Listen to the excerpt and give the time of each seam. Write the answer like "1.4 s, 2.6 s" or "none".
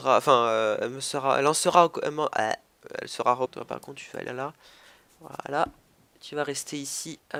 none